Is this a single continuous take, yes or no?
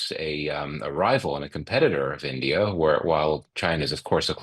yes